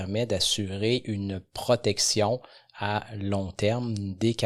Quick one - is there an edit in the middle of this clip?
no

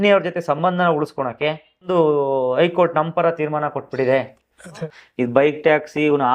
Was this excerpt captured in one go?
no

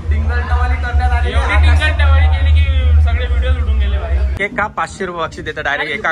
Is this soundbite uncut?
no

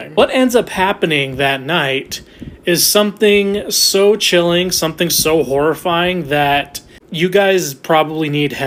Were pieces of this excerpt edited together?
no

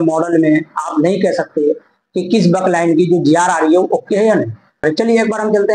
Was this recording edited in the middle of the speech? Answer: yes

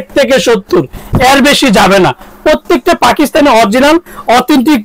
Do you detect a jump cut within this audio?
no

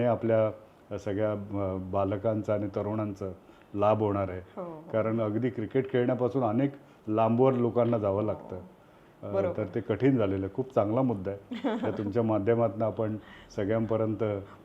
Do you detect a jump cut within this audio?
no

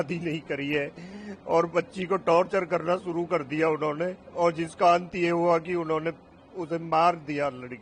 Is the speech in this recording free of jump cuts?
yes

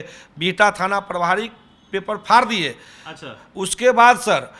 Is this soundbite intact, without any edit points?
yes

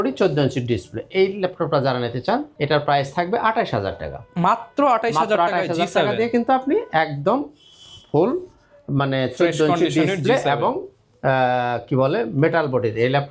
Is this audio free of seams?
yes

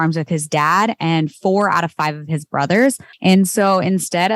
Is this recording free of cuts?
no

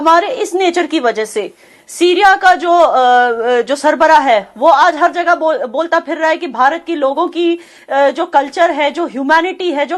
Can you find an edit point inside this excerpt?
no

